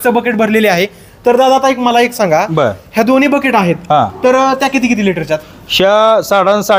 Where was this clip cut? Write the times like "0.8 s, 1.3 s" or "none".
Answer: none